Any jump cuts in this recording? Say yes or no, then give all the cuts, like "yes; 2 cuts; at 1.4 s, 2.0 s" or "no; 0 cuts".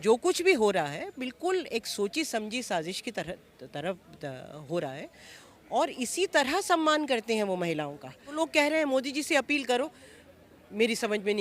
yes; 1 cut; at 8.3 s